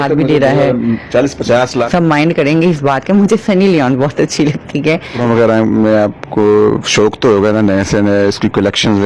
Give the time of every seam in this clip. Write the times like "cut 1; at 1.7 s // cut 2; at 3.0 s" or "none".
cut 1; at 1.9 s // cut 2; at 5.1 s